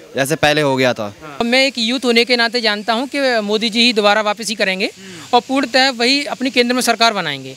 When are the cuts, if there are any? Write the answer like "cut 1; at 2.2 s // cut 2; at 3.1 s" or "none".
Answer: cut 1; at 1.4 s